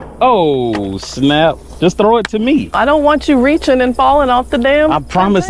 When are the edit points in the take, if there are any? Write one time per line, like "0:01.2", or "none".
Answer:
0:01.7
0:02.7